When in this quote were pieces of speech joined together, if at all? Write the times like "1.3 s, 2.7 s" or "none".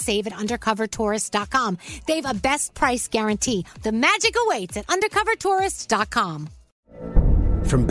6.8 s